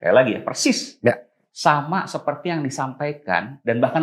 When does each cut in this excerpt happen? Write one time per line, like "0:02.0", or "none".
none